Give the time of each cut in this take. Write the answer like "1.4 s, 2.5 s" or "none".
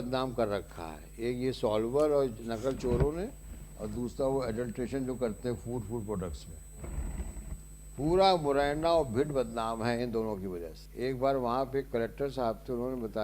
10.8 s

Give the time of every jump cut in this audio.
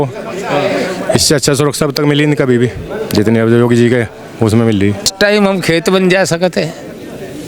5.1 s

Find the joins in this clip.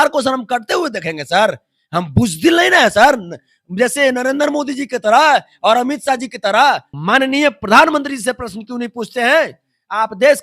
6.9 s

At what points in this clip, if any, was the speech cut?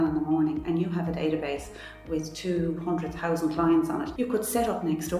4.1 s

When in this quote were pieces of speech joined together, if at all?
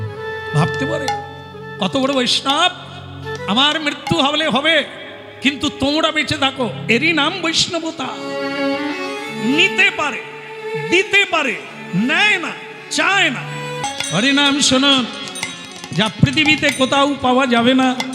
13.8 s

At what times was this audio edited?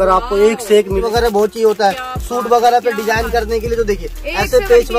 1.0 s

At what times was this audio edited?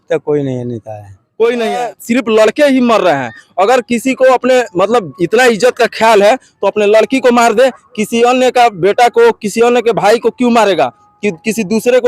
1.9 s

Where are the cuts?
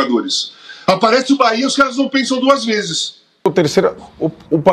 3.5 s

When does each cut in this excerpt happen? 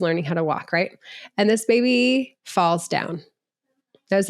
2.4 s

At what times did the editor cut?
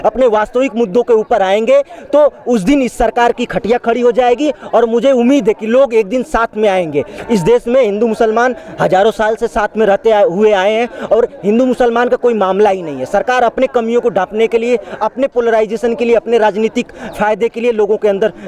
none

